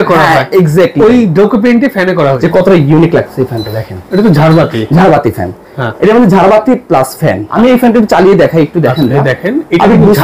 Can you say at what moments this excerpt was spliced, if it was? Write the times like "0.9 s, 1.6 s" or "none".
2.4 s, 7.5 s